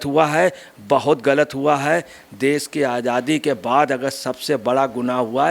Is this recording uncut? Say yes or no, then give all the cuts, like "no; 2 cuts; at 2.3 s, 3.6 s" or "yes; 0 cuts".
yes; 0 cuts